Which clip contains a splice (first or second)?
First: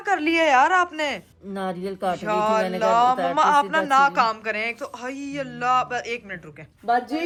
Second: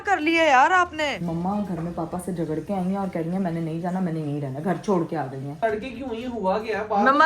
second